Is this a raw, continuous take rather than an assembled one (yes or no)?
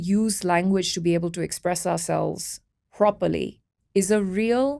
yes